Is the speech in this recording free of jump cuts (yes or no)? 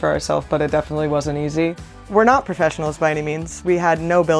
no